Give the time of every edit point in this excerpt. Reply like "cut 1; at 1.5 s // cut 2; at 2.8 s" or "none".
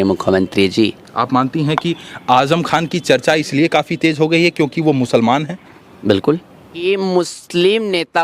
cut 1; at 1.0 s // cut 2; at 6.8 s